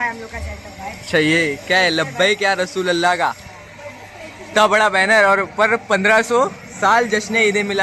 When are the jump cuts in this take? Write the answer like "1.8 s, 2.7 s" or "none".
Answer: none